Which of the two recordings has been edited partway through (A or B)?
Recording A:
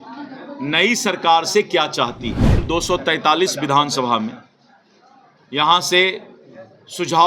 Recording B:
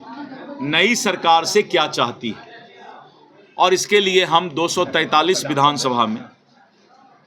A